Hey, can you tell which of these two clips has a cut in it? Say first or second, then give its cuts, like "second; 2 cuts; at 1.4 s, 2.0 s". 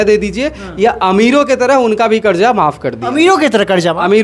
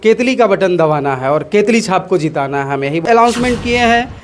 second; 1 cut; at 3.0 s